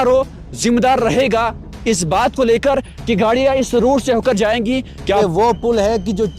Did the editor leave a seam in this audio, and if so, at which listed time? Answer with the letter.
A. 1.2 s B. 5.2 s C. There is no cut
B